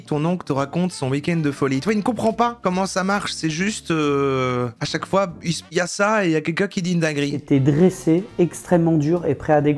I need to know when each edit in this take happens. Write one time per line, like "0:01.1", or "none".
none